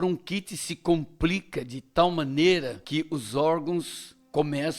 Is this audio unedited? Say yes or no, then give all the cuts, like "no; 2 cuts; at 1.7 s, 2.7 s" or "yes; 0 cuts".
no; 1 cut; at 2.8 s